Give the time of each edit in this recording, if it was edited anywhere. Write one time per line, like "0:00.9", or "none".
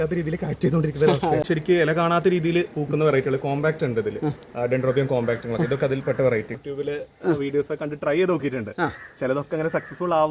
0:01.4
0:06.5